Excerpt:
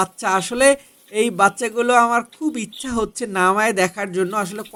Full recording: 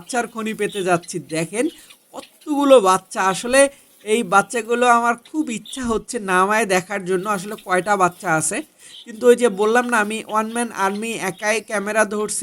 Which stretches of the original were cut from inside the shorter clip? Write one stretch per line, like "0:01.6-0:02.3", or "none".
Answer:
none

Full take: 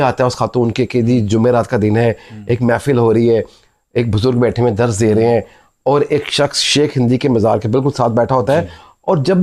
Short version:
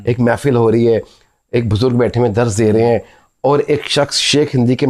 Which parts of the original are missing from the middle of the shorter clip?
none

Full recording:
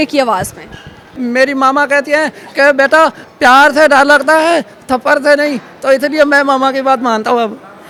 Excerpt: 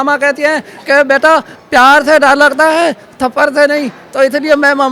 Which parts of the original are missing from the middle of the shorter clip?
none

